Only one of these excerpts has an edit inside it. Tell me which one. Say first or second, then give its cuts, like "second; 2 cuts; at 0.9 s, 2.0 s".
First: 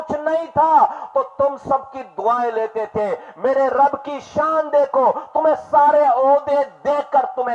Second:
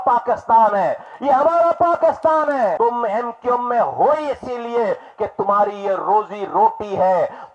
second; 1 cut; at 2.8 s